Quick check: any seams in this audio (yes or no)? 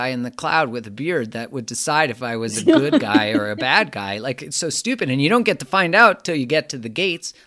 no